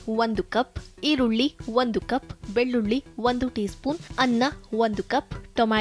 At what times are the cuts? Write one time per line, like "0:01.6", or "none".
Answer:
0:04.1